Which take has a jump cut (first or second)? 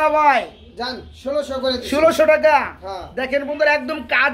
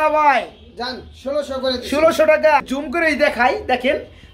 second